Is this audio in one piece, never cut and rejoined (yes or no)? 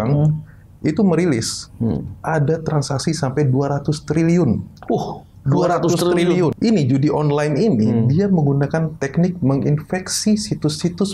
no